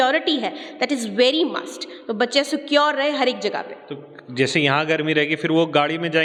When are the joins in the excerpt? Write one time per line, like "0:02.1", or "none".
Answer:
none

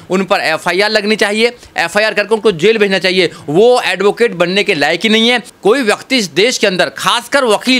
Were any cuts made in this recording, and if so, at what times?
0:05.5

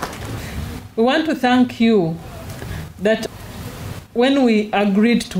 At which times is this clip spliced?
none

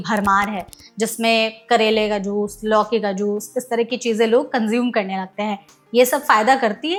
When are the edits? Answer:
none

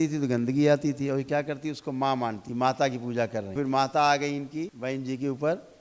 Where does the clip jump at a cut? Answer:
0:02.4
0:03.5
0:04.7

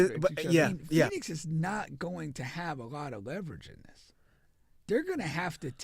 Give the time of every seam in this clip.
0:01.2

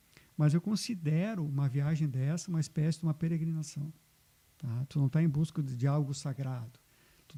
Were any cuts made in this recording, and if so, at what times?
none

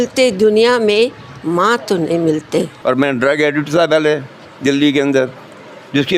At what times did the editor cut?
0:02.7

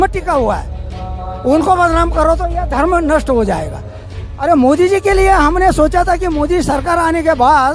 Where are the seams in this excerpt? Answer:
0:04.1

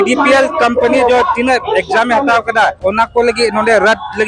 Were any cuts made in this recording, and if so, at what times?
0:02.8

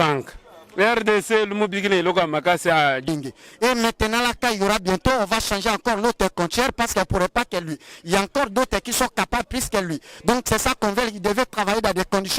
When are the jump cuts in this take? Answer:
0:03.0

